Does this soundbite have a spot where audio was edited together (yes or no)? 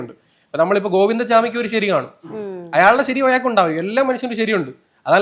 no